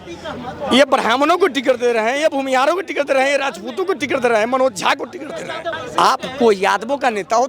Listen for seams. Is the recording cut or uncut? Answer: cut